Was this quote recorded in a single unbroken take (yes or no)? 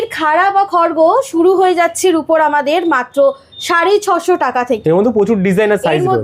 yes